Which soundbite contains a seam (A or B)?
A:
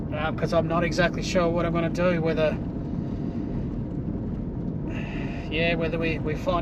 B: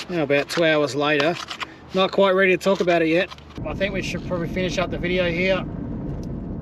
B